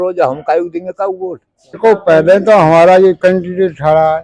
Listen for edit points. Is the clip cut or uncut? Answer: cut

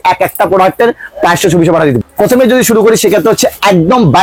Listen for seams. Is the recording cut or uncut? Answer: uncut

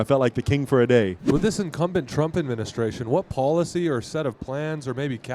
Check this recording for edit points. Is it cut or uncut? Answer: cut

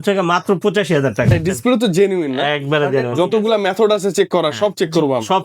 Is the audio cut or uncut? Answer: cut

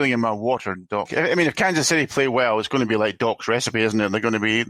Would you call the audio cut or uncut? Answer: cut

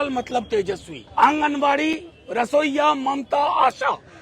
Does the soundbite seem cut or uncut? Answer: cut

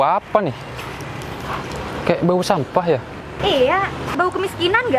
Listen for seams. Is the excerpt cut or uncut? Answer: cut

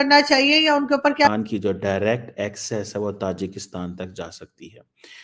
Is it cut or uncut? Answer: cut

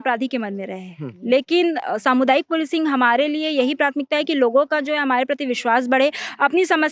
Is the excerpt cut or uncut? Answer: uncut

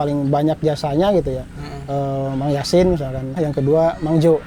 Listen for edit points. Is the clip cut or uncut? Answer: cut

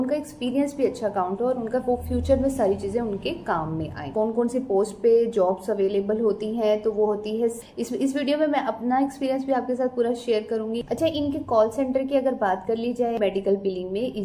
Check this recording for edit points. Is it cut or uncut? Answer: cut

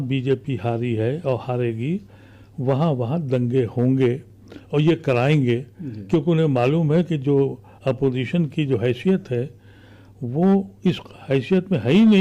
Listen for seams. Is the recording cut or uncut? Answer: uncut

